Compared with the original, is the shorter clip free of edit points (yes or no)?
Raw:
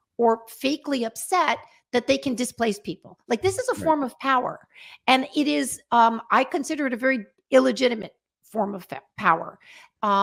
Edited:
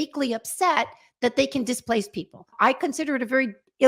no